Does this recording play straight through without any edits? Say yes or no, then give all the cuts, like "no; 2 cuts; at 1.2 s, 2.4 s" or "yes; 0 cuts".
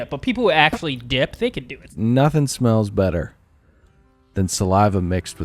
no; 1 cut; at 1.9 s